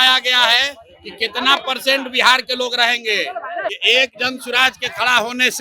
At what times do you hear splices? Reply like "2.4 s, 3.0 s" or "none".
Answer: 3.8 s